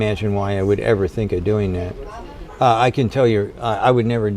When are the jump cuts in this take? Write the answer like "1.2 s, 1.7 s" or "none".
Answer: 2.4 s